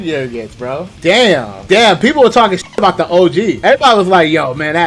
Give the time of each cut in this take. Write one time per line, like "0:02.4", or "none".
0:00.9
0:01.5